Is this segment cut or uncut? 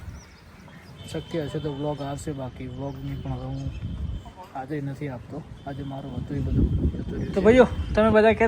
cut